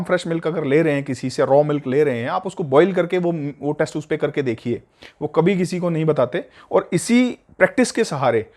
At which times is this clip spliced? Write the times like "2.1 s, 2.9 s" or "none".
none